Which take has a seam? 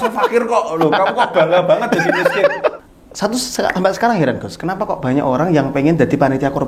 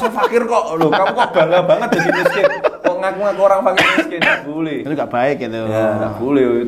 first; 1 cut; at 2.8 s

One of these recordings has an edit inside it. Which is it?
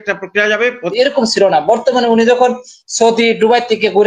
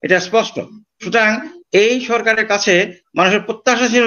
first; 1 cut; at 0.9 s

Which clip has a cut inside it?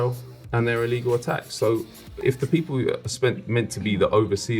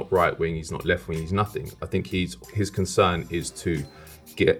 first; 1 cut; at 2.2 s

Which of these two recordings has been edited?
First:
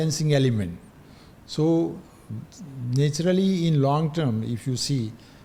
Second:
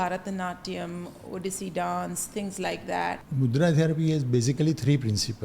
second; 1 cut; at 3.2 s

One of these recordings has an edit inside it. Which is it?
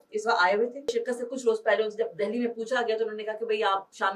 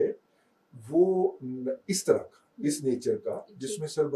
first; 1 cut; at 0.9 s

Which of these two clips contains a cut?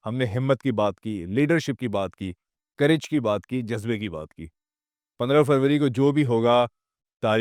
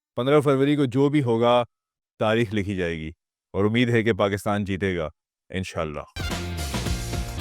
second; 1 cut; at 6.1 s

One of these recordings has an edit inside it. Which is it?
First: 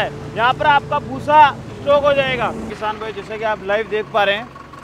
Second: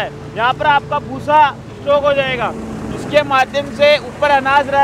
first; 1 cut; at 2.7 s

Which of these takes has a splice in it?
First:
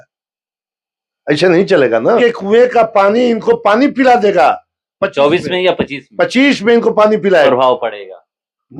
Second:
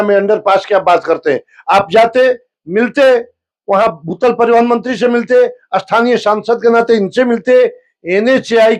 first; 2 cuts; at 2.2 s, 7.5 s

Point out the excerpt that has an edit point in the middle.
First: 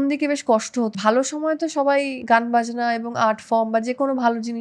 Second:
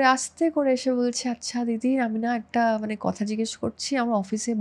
first; 2 cuts; at 0.9 s, 2.2 s

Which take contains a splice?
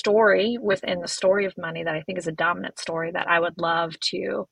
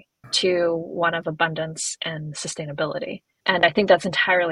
second; 1 cut; at 3.3 s

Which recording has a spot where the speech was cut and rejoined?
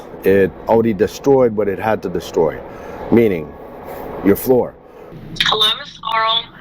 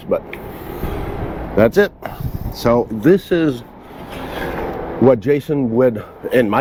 first; 1 cut; at 4.8 s

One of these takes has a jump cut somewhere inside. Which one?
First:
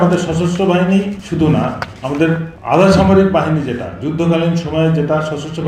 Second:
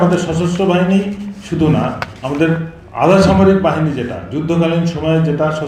first; 2 cuts; at 1.2 s, 2.5 s

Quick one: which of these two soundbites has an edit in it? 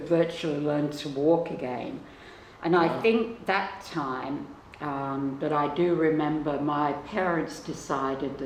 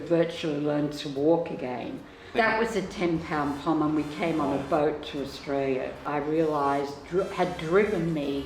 second; 2 cuts; at 2.3 s, 6.0 s

